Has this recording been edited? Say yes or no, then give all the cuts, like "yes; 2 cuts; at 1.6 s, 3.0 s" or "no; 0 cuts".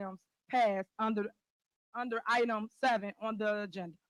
no; 0 cuts